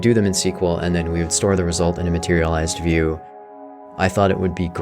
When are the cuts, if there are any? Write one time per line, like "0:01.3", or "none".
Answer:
0:03.8